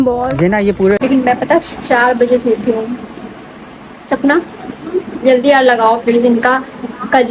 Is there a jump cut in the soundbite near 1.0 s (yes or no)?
yes